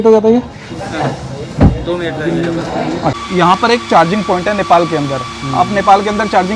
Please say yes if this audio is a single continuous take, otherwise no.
no